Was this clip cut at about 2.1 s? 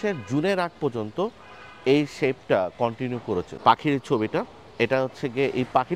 no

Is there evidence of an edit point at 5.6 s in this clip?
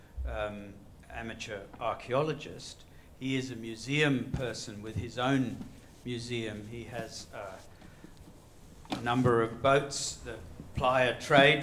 yes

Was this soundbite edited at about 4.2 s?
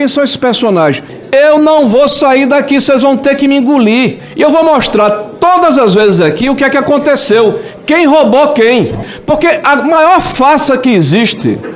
yes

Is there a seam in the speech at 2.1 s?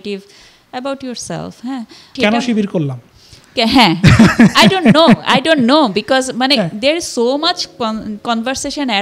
yes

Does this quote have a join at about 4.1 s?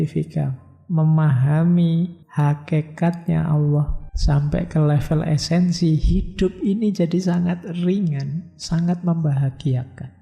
yes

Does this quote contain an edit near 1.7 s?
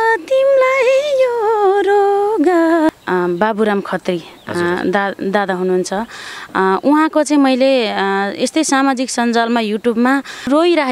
no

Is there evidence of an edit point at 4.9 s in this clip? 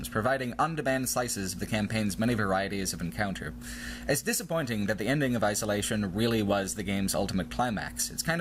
yes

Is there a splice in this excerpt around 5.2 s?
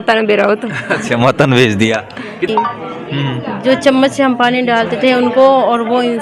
no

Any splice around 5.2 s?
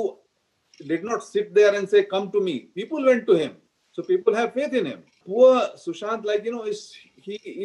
yes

